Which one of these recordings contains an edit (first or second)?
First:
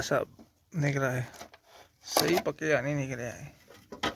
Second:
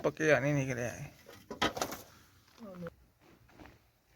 second